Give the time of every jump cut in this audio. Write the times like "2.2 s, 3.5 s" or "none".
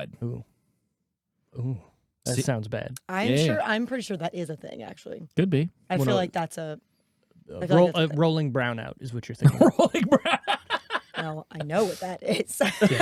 none